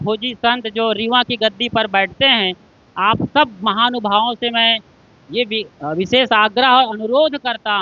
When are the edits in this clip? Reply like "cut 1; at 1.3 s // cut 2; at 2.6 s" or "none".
none

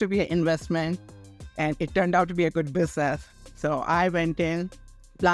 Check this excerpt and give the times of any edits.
none

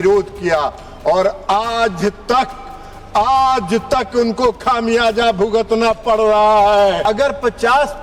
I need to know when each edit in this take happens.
cut 1; at 7.0 s

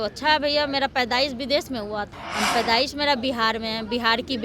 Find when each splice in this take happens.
cut 1; at 2.1 s

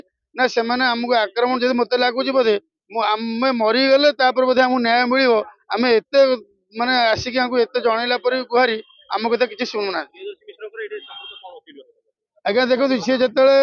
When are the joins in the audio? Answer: none

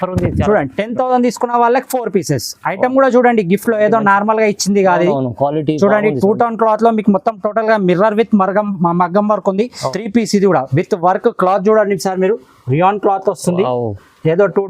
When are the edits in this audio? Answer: cut 1; at 9.9 s

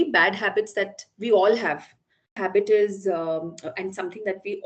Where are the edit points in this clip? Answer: cut 1; at 2.3 s

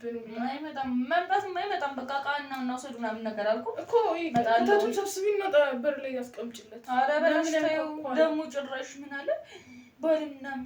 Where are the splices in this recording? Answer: none

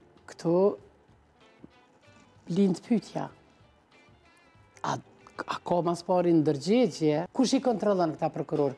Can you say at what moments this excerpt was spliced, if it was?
cut 1; at 7.3 s

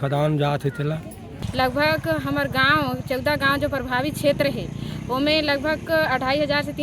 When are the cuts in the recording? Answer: cut 1; at 1.4 s

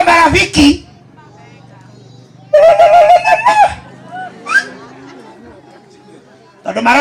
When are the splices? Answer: none

